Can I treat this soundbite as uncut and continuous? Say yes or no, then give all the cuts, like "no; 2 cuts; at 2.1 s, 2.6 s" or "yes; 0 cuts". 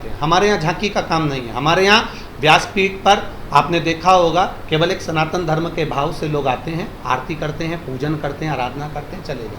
yes; 0 cuts